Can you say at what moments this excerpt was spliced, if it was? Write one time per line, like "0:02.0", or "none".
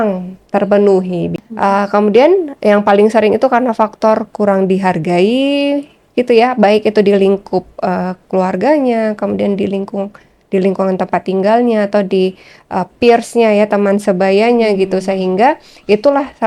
0:01.4